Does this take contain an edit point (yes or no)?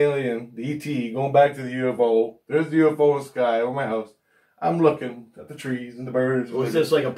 no